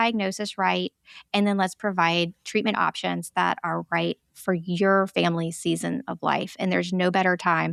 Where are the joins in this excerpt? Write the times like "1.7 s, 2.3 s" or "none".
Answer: none